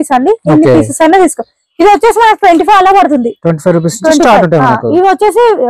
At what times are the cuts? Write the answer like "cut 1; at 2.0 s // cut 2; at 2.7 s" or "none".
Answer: none